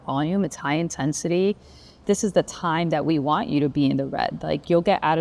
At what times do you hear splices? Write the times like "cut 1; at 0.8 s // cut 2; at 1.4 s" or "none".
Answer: cut 1; at 2.0 s